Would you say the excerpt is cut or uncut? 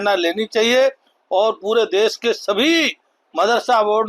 uncut